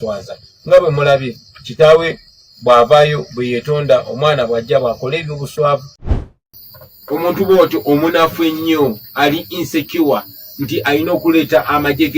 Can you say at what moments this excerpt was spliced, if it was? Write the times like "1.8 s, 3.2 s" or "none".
6.0 s